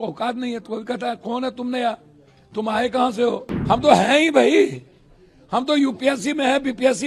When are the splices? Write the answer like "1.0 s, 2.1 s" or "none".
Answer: 3.5 s